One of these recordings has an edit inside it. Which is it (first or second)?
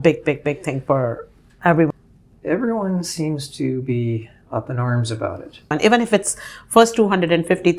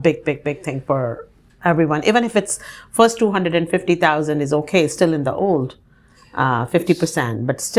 first